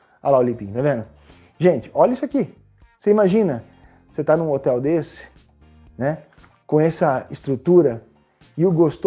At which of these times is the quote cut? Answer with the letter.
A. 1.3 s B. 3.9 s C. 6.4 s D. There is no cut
D